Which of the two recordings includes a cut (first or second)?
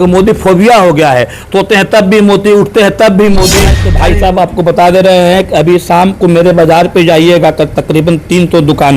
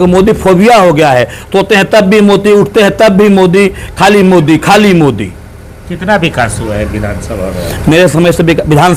first